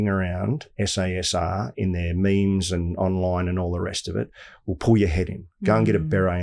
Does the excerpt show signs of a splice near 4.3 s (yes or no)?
no